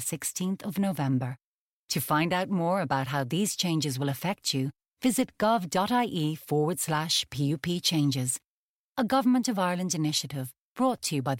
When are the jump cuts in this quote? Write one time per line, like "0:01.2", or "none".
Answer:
none